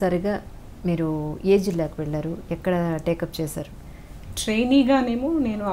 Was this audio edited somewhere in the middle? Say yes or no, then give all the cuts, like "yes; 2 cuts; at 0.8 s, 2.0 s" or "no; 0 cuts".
no; 0 cuts